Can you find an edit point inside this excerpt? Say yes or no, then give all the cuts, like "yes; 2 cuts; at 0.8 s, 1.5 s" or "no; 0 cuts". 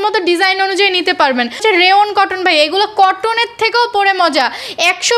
yes; 1 cut; at 1.6 s